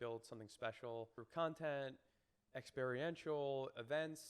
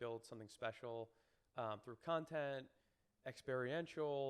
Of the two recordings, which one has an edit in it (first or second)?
first